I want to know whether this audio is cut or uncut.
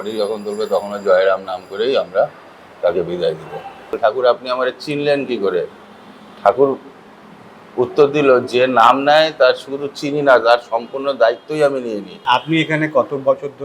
cut